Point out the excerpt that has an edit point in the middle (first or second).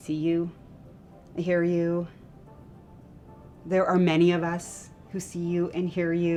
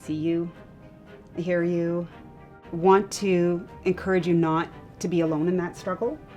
second